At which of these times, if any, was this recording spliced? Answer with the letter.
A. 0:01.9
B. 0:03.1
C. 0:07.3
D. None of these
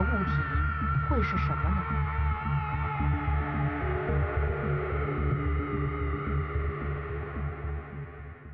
D